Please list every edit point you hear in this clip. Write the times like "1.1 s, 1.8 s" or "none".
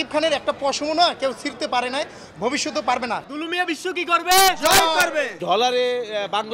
3.3 s, 5.4 s